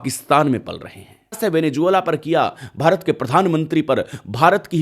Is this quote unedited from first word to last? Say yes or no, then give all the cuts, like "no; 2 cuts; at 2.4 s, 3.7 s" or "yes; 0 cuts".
no; 1 cut; at 1.4 s